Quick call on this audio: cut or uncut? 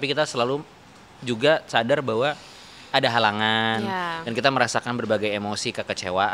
uncut